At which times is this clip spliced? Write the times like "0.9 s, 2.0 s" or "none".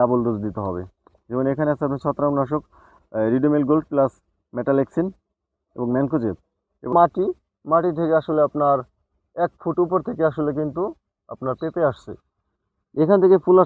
6.9 s